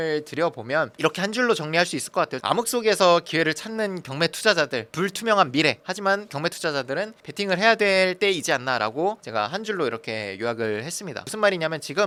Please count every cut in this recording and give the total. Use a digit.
0